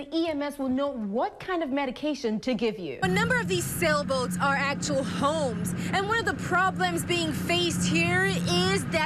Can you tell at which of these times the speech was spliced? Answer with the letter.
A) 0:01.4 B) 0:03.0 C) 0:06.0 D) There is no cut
B